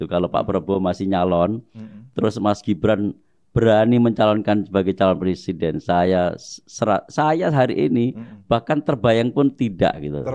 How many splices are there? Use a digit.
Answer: 0